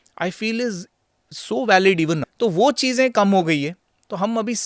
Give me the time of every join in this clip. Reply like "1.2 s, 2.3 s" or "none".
2.3 s